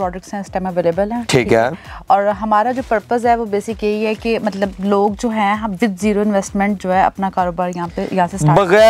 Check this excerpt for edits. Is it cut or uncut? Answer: uncut